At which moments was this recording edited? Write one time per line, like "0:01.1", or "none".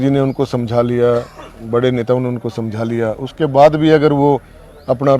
none